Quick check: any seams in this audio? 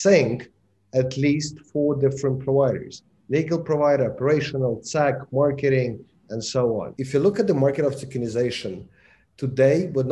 yes; 1 cut; at 6.9 s

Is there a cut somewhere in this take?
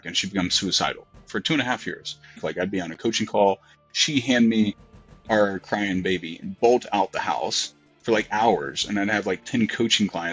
yes; 1 cut; at 2.4 s

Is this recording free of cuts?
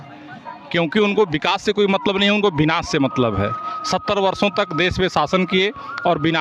yes; 0 cuts

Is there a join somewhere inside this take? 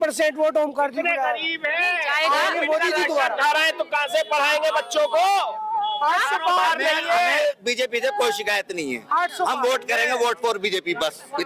no; 0 cuts

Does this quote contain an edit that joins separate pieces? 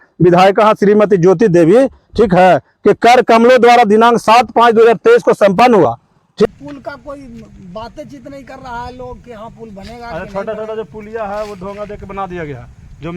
yes; 1 cut; at 6.5 s

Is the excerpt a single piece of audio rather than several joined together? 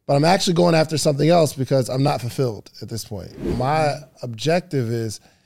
no; 1 cut; at 3.5 s

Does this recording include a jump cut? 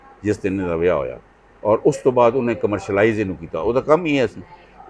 no; 0 cuts

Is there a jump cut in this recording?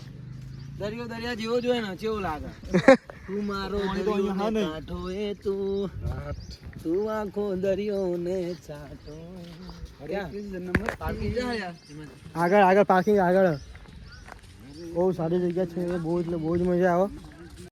no; 0 cuts

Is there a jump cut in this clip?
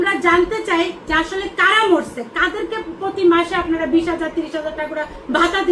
no; 0 cuts

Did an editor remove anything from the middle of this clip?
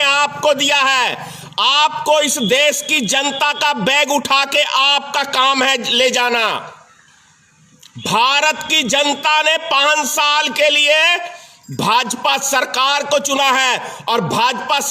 no; 0 cuts

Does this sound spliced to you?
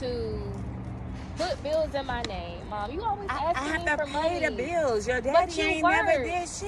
no; 0 cuts

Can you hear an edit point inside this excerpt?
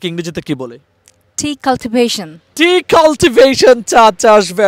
no; 0 cuts

